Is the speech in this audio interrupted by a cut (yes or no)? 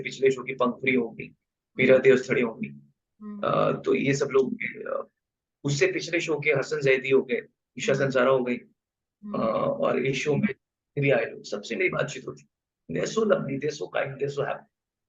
no